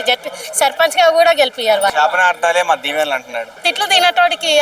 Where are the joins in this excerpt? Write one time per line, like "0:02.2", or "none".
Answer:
0:01.9
0:03.7